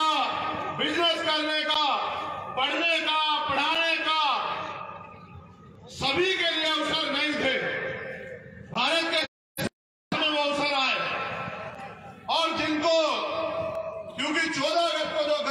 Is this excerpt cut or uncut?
uncut